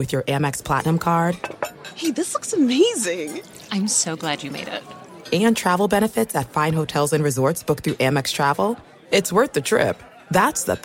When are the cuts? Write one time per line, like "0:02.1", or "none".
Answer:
none